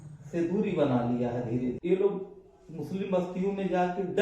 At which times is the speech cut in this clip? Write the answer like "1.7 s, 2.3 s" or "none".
1.8 s